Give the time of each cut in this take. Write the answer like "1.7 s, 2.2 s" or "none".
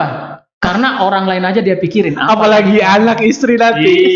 none